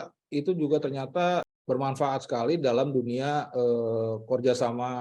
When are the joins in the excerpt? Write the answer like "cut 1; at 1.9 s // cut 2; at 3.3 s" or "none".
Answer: cut 1; at 1.5 s